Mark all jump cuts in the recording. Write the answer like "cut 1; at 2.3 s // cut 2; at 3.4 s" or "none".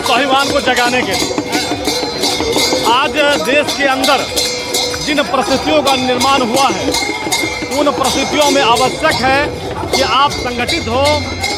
none